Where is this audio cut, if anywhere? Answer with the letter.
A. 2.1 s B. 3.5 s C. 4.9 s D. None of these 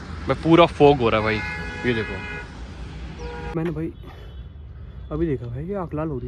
B